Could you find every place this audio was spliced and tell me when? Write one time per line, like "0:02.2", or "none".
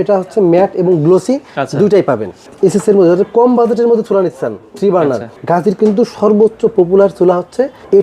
0:02.4
0:05.3